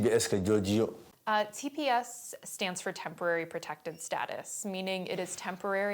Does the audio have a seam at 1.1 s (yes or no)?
yes